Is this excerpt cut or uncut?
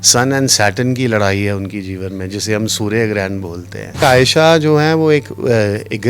cut